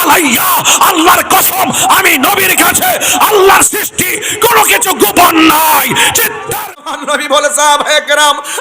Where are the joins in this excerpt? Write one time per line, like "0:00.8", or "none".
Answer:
0:06.8